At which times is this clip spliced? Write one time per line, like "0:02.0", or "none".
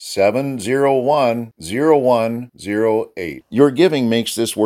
none